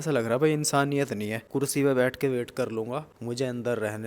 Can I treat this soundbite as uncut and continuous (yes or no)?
no